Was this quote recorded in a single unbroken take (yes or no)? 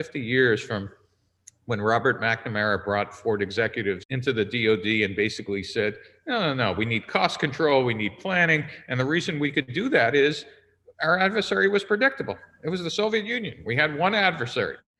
yes